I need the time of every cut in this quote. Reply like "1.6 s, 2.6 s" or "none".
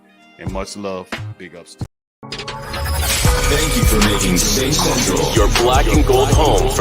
2.4 s